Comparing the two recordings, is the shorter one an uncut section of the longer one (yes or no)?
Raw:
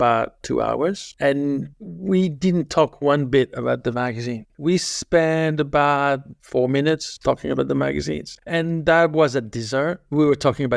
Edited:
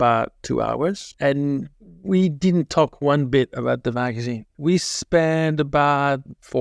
yes